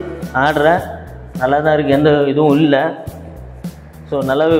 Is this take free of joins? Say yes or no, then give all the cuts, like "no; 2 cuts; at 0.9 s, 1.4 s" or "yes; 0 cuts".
yes; 0 cuts